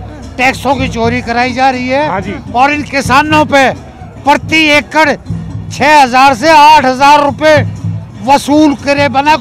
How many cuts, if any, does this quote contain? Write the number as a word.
zero